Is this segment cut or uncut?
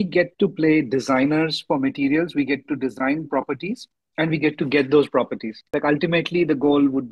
cut